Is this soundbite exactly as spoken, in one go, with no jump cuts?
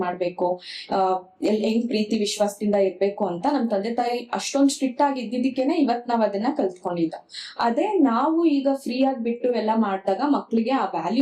yes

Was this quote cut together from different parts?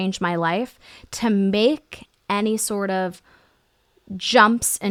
no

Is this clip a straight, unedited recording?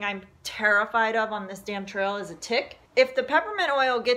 no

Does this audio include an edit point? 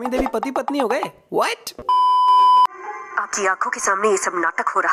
no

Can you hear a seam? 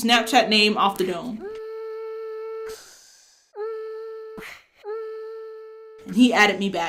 no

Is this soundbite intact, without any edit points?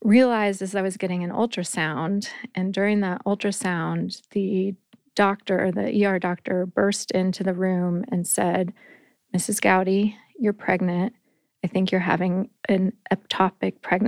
yes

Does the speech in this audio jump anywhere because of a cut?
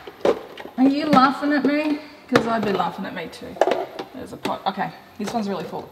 no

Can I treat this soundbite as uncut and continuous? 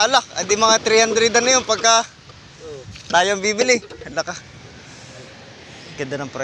yes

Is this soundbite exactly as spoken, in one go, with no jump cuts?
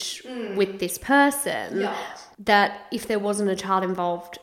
no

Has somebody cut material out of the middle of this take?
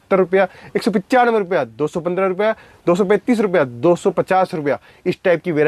no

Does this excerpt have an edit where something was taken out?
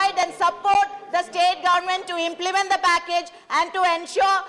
no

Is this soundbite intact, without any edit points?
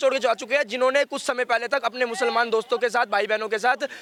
yes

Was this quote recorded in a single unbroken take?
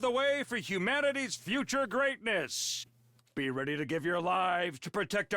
no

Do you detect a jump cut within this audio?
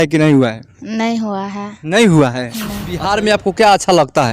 yes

